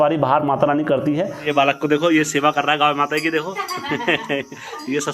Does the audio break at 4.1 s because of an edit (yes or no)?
no